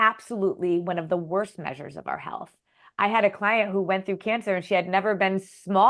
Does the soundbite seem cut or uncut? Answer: uncut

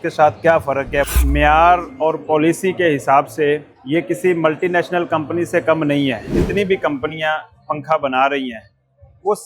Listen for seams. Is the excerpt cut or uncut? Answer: cut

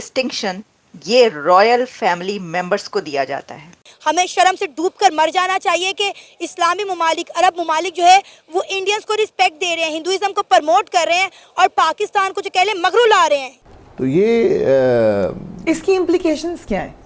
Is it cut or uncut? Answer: uncut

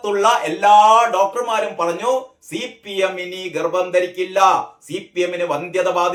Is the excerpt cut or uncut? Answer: uncut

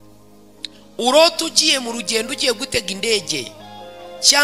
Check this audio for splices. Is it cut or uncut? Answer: cut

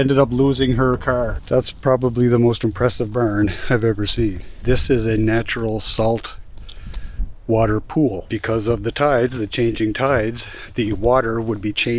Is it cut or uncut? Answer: cut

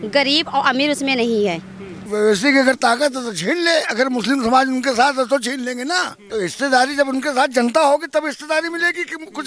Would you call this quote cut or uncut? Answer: cut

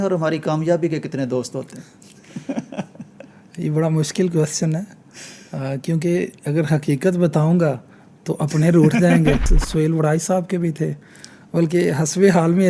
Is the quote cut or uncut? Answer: cut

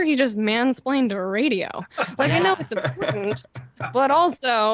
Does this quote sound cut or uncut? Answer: uncut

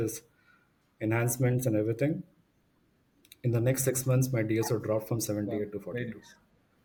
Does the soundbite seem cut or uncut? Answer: uncut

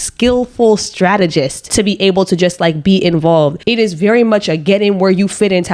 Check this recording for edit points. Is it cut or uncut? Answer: uncut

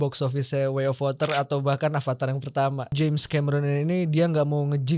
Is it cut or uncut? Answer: cut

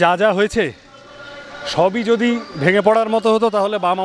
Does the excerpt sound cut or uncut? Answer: uncut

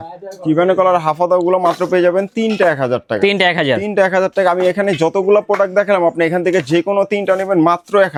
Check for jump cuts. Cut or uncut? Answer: uncut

